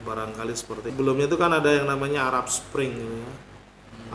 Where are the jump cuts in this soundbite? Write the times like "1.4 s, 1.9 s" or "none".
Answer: 0.9 s